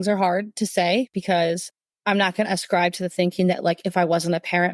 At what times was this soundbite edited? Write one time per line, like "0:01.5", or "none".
0:01.7